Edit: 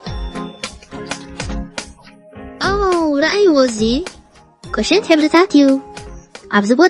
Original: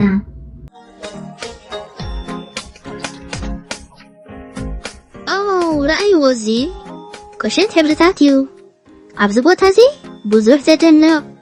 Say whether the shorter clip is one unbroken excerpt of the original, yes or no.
no